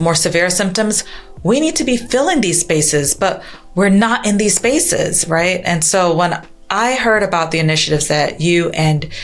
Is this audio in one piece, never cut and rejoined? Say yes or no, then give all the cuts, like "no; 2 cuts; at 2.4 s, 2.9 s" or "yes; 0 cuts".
yes; 0 cuts